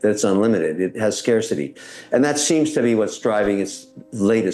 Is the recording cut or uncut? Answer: uncut